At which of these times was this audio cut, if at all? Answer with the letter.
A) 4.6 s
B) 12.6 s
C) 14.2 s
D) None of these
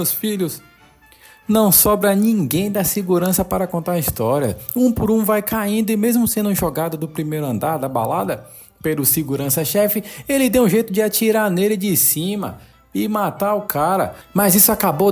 D